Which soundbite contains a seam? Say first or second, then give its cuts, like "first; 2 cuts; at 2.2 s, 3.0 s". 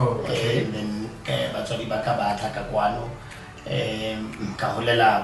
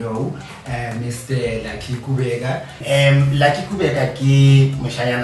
second; 1 cut; at 2.8 s